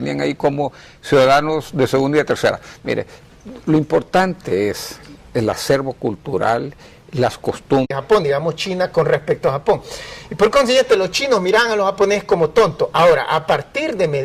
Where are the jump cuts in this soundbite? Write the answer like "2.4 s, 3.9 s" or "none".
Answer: none